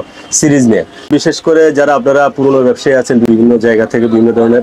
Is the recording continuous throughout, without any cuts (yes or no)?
no